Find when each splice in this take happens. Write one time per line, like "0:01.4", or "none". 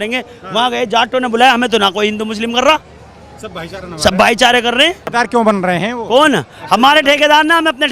0:05.1